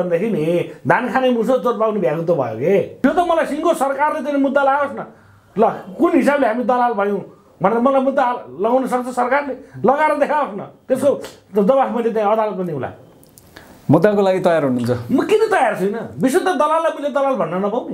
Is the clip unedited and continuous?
no; 1 cut; at 3.0 s

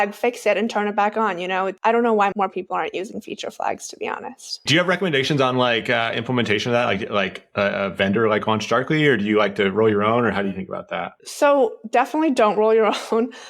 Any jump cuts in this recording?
yes; 3 cuts; at 1.8 s, 2.3 s, 4.6 s

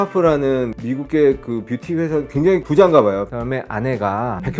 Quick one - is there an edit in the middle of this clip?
no; 0 cuts

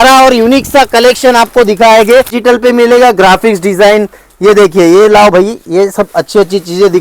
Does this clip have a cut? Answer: yes; 1 cut; at 2.3 s

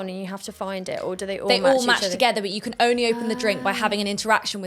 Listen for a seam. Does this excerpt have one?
no; 0 cuts

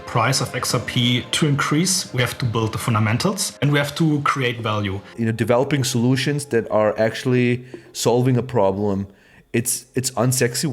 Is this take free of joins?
no; 3 cuts; at 1.3 s, 3.5 s, 5.0 s

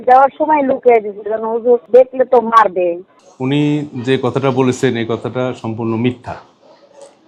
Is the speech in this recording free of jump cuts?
yes; 0 cuts

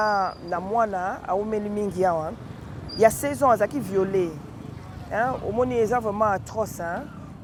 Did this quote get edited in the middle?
no; 0 cuts

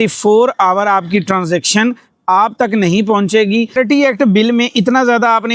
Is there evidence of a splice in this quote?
yes; 1 cut; at 3.8 s

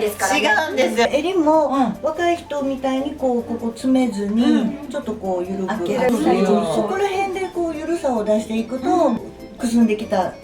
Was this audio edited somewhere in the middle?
yes; 2 cuts; at 1.0 s, 6.1 s

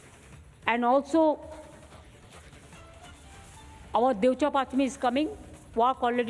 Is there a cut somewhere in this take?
yes; 2 cuts; at 1.8 s, 3.9 s

